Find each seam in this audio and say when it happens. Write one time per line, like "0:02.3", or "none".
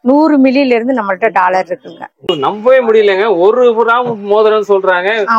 0:02.3

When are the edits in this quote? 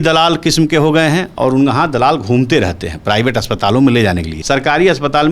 0:04.3

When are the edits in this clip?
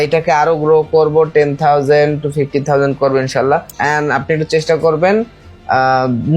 0:03.8

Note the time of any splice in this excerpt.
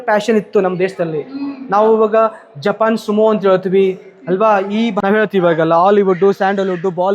0:05.0

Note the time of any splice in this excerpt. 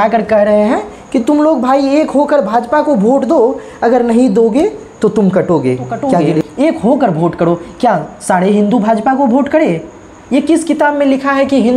0:06.3

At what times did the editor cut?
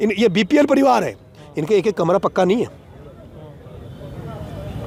none

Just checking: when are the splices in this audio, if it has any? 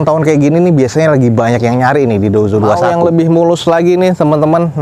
0:02.8

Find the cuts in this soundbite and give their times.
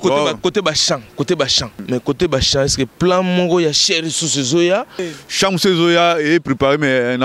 0:01.8
0:05.1

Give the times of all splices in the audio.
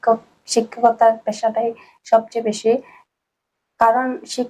none

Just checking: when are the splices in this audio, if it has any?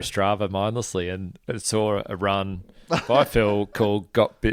none

